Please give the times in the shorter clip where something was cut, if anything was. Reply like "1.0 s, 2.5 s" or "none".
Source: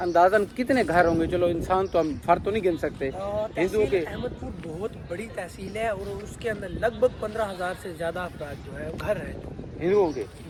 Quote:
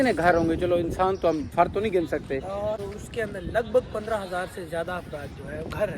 2.8 s